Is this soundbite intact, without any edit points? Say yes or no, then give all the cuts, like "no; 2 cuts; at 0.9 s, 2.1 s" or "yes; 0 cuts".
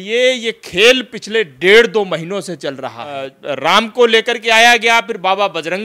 no; 1 cut; at 3.3 s